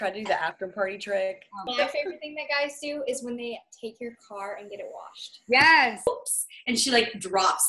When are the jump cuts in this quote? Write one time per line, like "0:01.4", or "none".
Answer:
0:01.6
0:06.1